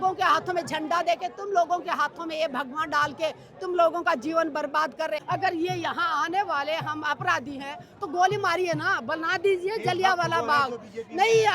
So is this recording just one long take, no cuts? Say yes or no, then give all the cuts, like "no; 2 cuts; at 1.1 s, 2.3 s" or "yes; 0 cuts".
no; 1 cut; at 5.2 s